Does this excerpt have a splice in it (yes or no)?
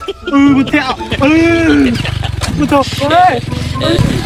no